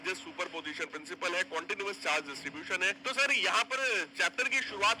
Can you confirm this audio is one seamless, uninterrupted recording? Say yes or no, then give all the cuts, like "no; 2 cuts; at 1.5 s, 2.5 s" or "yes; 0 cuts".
no; 1 cut; at 3.0 s